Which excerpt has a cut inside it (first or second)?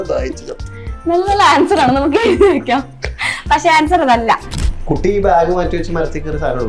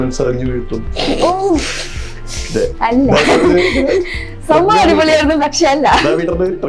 first